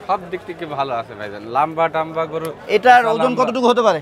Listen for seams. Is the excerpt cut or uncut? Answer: uncut